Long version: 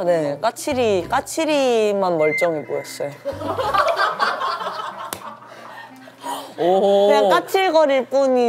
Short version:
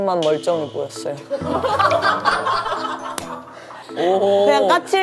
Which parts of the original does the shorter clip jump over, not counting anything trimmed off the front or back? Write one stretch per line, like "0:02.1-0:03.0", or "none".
0:05.8-0:06.5